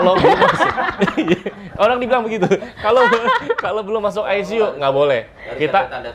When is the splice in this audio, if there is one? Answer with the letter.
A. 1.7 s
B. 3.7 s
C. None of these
C